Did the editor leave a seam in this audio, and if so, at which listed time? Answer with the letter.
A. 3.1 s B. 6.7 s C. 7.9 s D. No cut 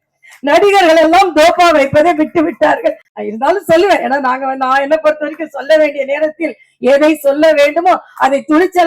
A